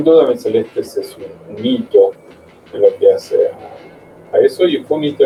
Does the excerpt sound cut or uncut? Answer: uncut